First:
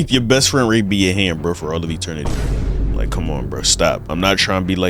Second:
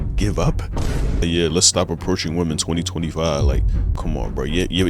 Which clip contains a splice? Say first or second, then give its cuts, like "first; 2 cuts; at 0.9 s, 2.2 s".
second; 2 cuts; at 1.2 s, 4.0 s